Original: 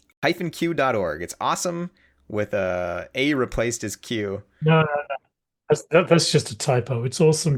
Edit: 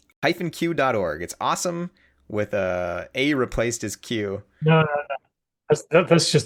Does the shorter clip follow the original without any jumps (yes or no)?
yes